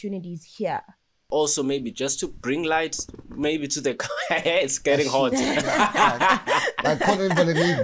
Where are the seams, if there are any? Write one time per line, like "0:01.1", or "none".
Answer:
0:01.2